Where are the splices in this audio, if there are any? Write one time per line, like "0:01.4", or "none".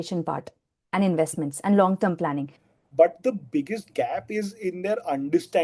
0:02.6